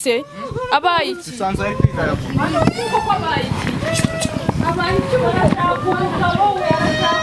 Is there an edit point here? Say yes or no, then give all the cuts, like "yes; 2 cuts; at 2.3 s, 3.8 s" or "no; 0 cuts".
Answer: no; 0 cuts